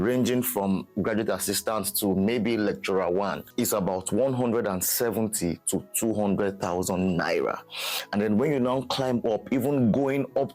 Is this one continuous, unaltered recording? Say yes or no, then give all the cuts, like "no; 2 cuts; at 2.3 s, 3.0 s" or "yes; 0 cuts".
yes; 0 cuts